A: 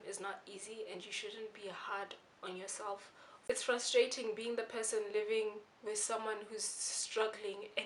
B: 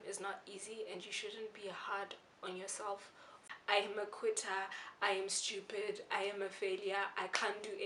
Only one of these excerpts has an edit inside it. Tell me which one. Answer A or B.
B